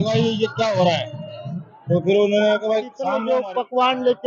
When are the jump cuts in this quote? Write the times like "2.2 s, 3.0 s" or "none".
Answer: 3.0 s